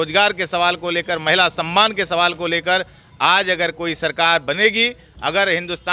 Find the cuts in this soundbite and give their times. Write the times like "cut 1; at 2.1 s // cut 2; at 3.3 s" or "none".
none